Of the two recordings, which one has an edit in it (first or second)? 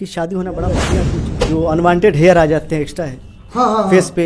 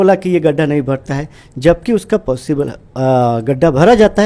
first